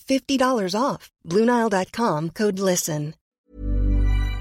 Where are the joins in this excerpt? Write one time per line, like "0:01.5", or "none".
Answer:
0:03.2